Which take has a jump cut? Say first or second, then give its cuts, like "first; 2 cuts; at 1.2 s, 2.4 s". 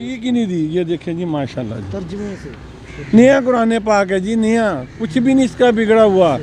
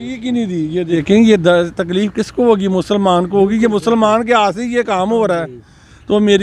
second; 1 cut; at 0.9 s